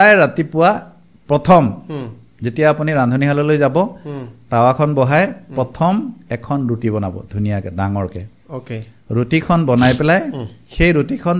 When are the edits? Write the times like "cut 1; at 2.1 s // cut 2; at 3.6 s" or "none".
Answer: none